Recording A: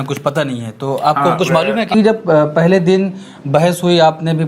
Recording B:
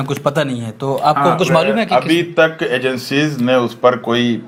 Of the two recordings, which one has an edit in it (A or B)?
A